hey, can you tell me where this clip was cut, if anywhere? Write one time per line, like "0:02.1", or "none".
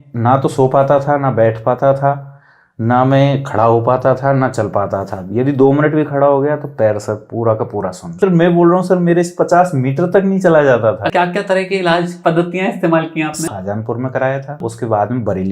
0:08.2
0:11.1
0:13.5
0:14.6